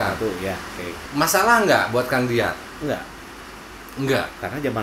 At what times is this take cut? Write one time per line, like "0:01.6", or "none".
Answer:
0:00.9
0:02.7